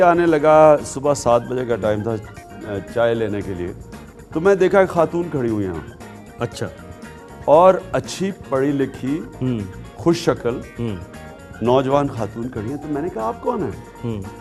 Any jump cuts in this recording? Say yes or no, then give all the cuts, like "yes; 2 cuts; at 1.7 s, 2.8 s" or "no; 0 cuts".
no; 0 cuts